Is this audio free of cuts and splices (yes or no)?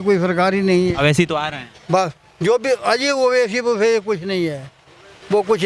yes